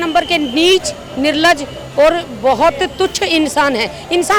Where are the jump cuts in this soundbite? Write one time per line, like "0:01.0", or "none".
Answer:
none